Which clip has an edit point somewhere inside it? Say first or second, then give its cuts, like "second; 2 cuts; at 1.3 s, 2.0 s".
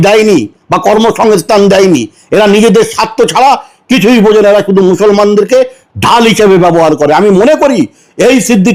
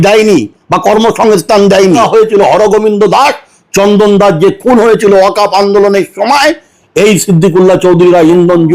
second; 1 cut; at 2.0 s